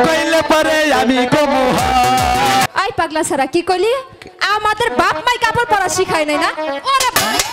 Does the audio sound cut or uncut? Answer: cut